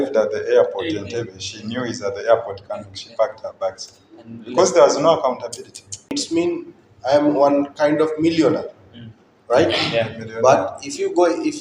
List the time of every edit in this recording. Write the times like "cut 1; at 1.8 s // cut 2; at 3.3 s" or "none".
cut 1; at 6.1 s